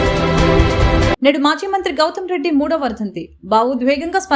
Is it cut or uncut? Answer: cut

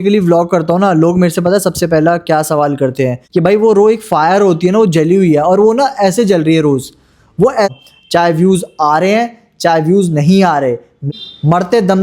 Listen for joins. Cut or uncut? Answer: cut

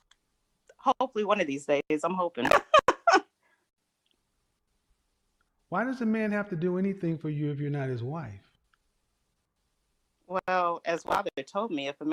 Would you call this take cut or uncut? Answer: uncut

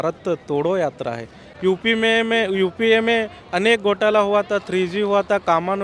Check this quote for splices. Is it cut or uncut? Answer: cut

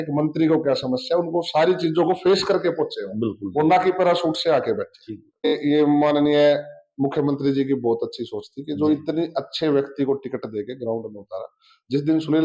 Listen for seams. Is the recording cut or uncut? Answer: cut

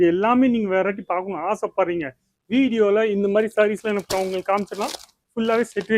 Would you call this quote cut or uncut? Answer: uncut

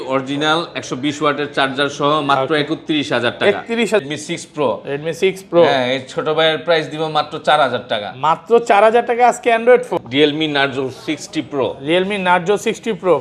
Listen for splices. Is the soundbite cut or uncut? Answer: cut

